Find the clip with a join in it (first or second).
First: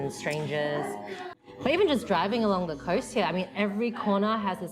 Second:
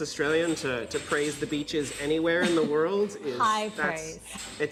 first